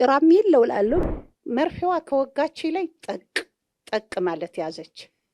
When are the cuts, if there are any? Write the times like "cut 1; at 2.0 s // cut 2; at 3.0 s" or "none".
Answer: cut 1; at 1.0 s